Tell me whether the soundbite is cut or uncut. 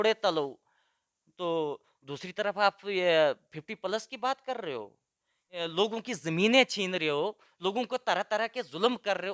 uncut